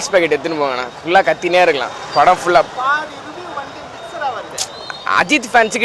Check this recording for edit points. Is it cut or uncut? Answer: uncut